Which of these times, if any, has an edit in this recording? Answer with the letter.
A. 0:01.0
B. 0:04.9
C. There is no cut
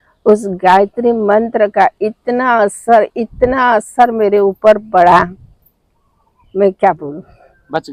C